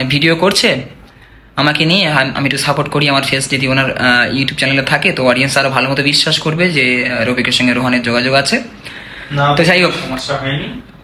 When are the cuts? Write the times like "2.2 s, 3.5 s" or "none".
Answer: none

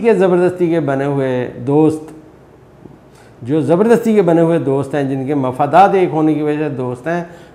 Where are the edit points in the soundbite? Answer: none

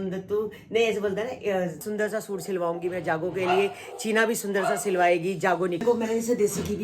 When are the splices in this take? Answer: 1.8 s, 5.8 s

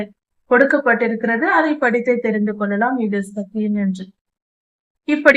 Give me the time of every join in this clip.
none

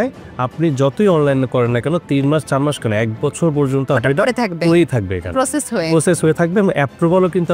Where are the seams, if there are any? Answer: none

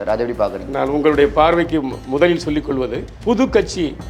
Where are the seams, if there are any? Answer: 3.1 s

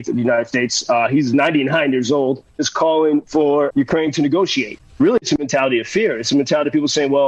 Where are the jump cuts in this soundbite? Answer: 2.6 s, 3.7 s, 4.8 s

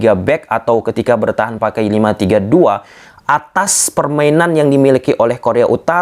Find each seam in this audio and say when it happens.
none

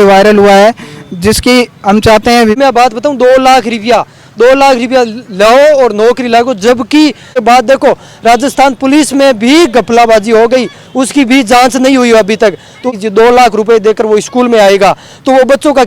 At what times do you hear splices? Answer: 2.6 s, 7.3 s, 12.9 s

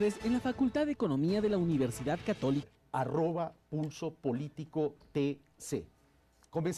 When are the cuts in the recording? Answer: none

